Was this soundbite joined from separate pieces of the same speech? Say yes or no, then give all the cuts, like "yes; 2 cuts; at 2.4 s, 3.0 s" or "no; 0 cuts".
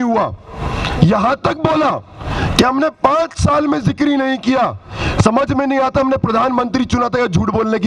no; 0 cuts